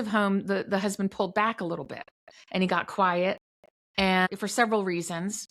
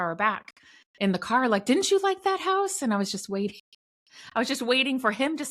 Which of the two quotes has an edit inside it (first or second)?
first